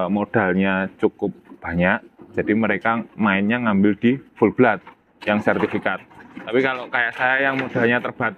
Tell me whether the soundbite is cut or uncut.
uncut